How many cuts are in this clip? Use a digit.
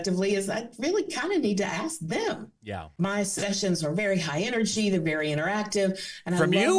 1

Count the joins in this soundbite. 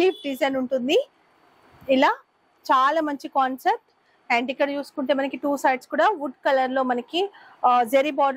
0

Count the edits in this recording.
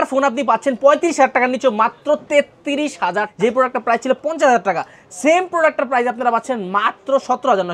1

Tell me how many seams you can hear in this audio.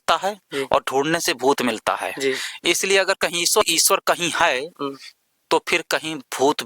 1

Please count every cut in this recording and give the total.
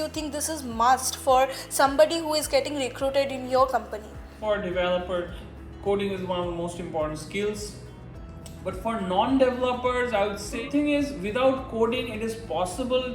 2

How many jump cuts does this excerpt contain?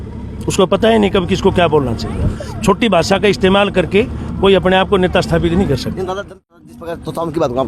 1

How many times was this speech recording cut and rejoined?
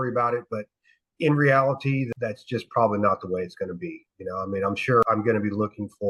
2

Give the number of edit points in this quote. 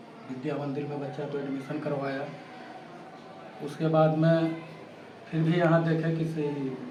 0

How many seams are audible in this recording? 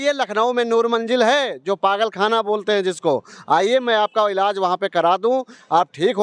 0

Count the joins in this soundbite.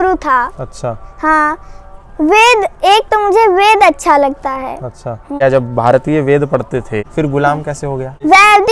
0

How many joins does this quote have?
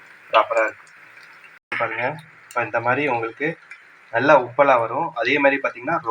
1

